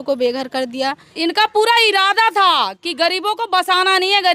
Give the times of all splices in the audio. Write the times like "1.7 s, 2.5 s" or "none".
1.1 s